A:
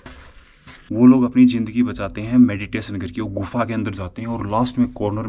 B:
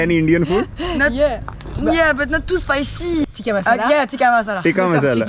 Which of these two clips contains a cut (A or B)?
B